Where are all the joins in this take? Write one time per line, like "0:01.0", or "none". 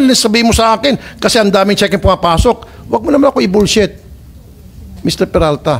none